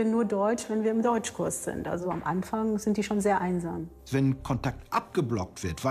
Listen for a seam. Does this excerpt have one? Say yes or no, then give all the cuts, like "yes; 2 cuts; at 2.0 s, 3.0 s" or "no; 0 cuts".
yes; 1 cut; at 3.9 s